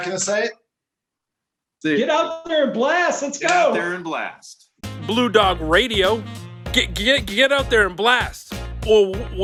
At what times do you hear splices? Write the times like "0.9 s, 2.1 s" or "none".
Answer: none

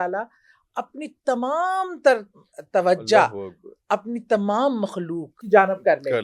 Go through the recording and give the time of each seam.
5.3 s

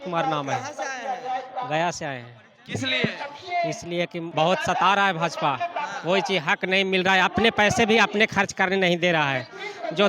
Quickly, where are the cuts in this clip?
4.2 s

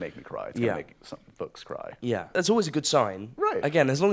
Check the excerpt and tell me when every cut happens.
2.3 s

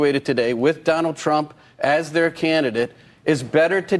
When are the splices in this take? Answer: none

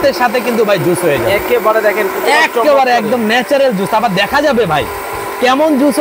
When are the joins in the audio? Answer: none

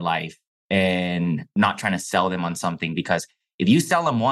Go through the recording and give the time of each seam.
none

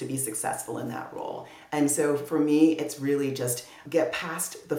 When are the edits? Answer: none

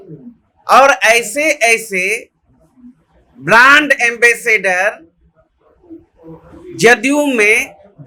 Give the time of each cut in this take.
none

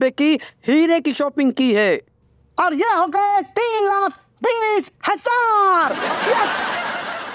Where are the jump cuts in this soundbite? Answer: none

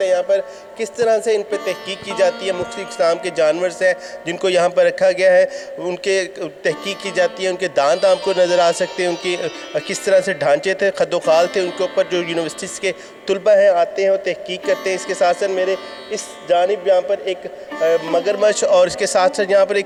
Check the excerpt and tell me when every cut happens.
none

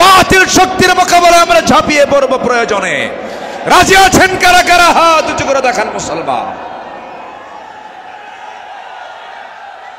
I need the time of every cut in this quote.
none

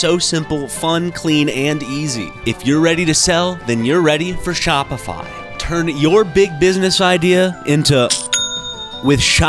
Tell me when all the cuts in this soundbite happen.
2.3 s, 5.5 s

